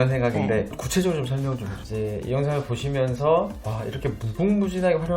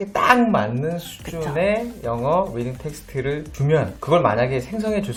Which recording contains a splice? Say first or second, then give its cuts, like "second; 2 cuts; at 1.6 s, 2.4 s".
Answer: first; 1 cut; at 1.7 s